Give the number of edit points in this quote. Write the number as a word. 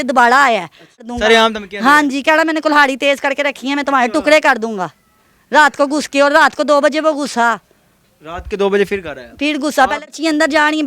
two